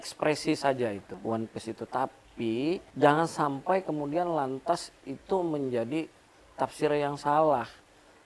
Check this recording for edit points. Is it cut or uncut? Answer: cut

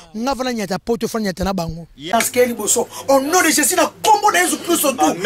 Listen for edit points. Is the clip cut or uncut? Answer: cut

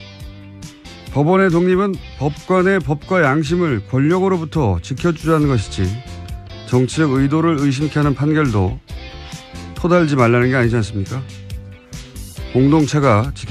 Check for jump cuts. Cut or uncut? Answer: cut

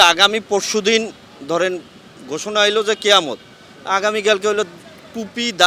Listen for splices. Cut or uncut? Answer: uncut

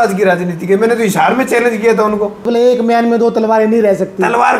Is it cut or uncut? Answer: cut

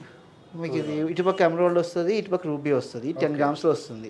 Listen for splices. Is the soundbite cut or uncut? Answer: uncut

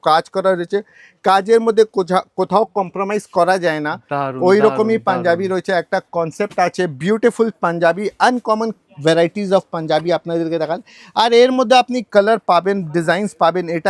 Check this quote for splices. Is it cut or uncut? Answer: uncut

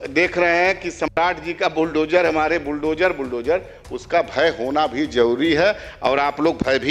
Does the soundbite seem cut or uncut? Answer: uncut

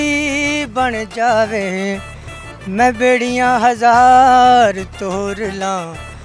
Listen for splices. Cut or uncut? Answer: uncut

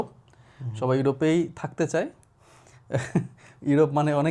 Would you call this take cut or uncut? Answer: uncut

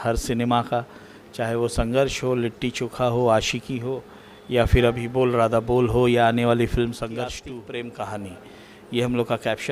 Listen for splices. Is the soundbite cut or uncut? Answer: cut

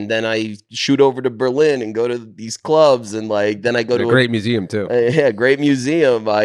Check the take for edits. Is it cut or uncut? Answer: uncut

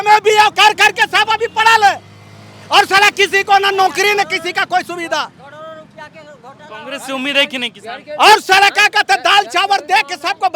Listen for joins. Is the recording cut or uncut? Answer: uncut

